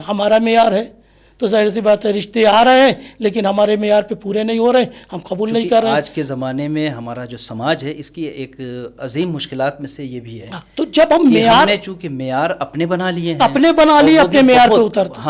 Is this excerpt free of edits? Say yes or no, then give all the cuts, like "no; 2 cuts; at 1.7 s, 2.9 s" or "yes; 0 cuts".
yes; 0 cuts